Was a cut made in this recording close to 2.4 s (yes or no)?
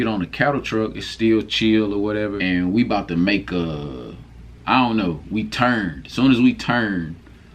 yes